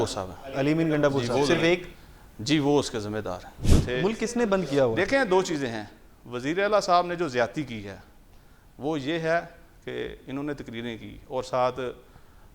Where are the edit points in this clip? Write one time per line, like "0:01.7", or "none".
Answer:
0:03.7